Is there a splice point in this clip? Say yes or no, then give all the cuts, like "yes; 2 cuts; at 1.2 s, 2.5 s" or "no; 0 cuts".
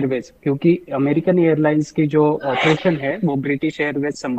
no; 0 cuts